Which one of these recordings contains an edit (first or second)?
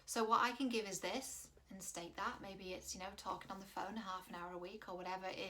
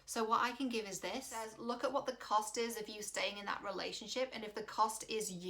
second